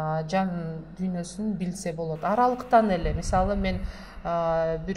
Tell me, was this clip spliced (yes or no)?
no